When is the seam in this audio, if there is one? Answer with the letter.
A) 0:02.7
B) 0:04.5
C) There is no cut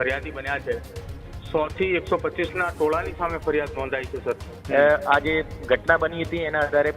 B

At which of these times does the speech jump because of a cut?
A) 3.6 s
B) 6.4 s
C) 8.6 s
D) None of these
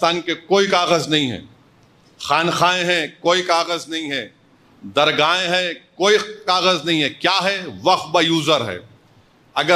D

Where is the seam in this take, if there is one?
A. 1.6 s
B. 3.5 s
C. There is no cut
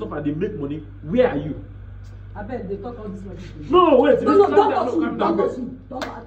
C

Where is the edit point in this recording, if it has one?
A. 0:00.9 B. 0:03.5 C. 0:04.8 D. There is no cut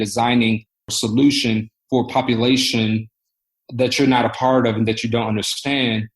A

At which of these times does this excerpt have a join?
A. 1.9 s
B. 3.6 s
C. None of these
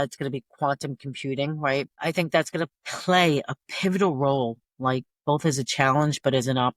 C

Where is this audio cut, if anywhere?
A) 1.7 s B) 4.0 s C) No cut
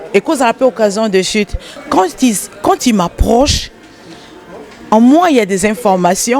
A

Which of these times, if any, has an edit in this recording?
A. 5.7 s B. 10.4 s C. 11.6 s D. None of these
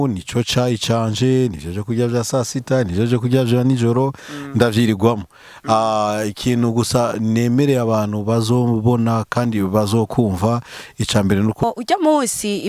C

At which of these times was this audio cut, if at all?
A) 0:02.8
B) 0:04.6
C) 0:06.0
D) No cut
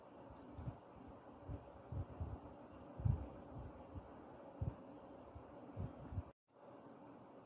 B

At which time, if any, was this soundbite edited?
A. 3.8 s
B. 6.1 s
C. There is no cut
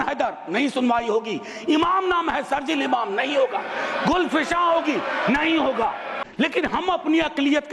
B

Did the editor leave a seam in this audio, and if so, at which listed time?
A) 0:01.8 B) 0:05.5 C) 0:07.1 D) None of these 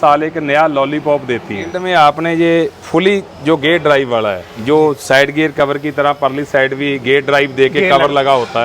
A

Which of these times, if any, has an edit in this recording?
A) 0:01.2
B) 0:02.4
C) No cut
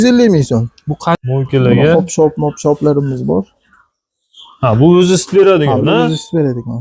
A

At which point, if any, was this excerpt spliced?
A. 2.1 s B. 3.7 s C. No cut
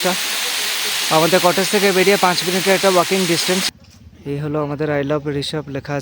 B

